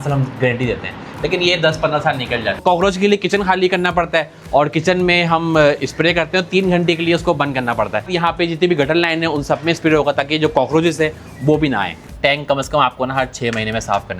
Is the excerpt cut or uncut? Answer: cut